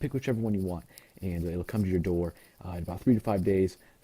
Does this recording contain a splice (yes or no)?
yes